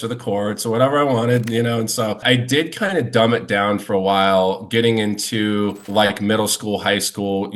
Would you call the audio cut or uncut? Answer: cut